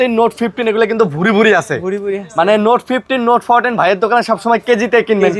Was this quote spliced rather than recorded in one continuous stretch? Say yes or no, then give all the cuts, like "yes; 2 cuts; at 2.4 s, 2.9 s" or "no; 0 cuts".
no; 0 cuts